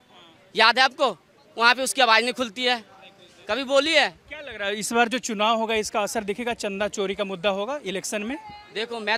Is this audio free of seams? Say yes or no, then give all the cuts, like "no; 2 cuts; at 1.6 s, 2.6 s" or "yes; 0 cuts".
yes; 0 cuts